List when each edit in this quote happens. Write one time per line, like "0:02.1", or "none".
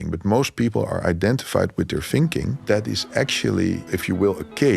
0:02.6
0:03.8